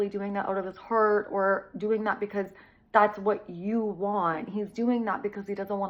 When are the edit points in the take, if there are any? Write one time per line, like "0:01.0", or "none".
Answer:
none